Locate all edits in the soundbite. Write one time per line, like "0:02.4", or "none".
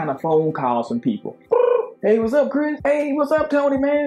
0:01.4